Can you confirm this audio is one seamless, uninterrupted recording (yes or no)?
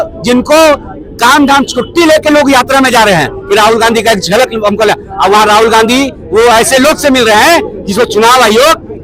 yes